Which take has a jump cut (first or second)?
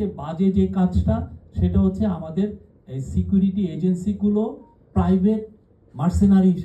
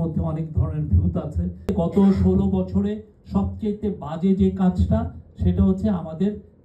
second